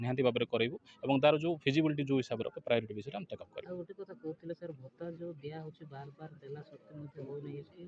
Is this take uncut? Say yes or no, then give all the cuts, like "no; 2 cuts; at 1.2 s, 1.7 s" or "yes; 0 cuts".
no; 1 cut; at 4.9 s